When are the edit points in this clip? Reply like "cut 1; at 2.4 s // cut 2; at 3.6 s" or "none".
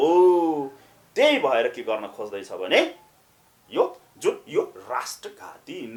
none